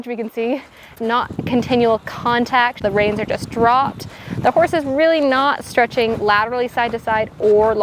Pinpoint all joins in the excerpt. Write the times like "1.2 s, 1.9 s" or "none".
1.0 s, 2.8 s